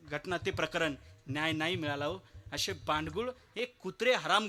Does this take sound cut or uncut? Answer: uncut